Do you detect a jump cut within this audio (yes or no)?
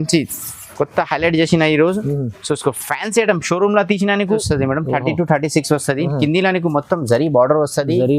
yes